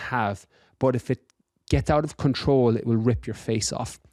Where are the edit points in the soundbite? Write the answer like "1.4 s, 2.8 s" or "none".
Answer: none